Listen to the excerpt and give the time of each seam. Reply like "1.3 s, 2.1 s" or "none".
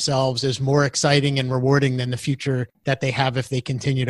2.7 s